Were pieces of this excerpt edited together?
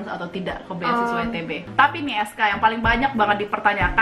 yes; 1 cut; at 1.6 s

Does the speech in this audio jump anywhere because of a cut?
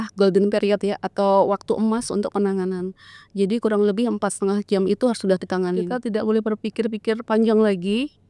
yes; 1 cut; at 5.9 s

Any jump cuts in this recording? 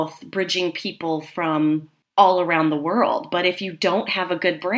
yes; 1 cut; at 2.0 s

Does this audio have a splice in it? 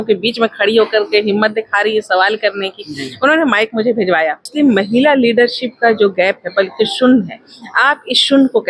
yes; 1 cut; at 4.5 s

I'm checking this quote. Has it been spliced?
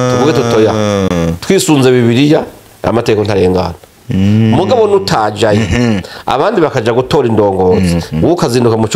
no; 0 cuts

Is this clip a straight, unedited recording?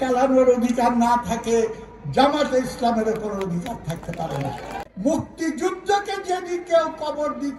no; 1 cut; at 4.7 s

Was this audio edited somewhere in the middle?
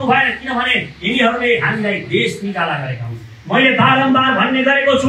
no; 0 cuts

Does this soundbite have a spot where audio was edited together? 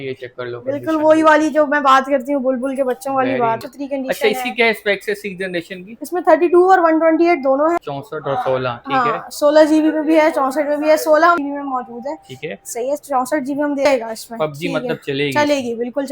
yes; 4 cuts; at 3.6 s, 7.8 s, 11.4 s, 13.8 s

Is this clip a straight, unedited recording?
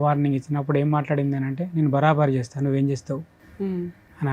yes; 0 cuts

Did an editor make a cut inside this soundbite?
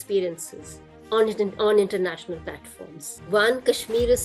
yes; 1 cut; at 3.2 s

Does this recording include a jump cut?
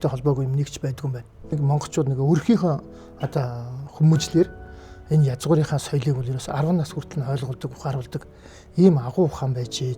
yes; 1 cut; at 1.6 s

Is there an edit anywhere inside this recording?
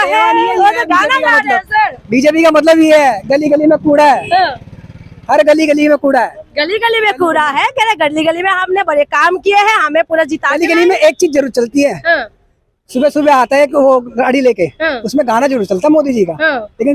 no; 0 cuts

